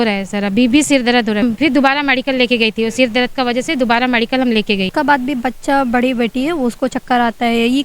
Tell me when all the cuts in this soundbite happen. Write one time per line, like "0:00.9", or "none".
0:01.4
0:04.9